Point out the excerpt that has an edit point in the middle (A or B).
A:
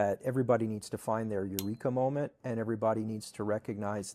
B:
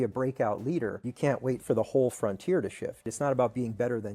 B